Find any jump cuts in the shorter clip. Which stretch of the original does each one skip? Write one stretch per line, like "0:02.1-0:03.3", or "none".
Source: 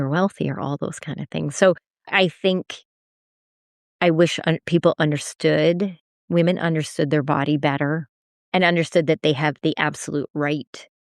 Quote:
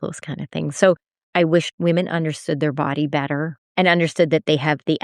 0:02.2-0:05.9
0:08.1-0:08.3

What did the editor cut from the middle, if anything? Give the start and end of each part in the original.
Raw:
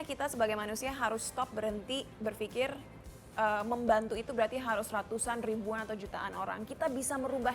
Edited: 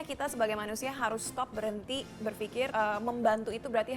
0:02.7-0:03.3

